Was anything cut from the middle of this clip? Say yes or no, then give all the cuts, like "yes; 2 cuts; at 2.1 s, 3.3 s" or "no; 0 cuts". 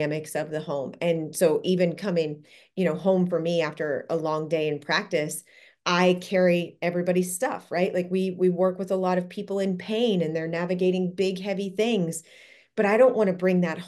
no; 0 cuts